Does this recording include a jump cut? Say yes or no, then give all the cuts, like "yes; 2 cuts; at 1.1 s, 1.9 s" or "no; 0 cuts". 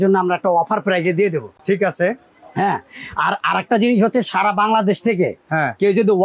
no; 0 cuts